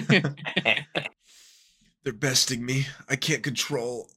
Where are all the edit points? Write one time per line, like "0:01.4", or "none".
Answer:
0:01.1